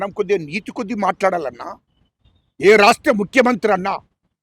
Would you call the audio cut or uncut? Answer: uncut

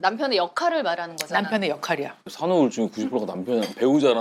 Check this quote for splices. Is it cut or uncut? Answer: cut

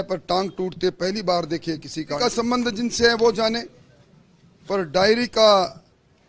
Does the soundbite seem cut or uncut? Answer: cut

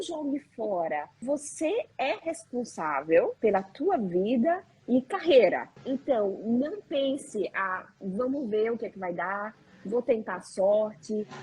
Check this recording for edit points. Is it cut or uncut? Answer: cut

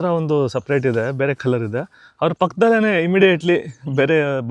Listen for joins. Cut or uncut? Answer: uncut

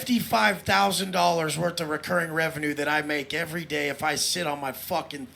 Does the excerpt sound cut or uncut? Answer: uncut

